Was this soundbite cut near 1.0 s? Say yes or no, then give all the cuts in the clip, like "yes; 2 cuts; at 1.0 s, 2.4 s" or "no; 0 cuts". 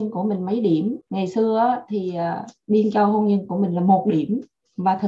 yes; 1 cut; at 1.0 s